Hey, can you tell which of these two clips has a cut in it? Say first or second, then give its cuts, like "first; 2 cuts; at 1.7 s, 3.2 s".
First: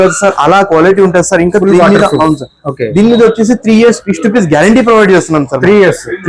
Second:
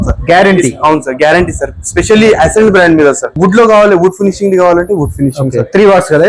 second; 1 cut; at 3.3 s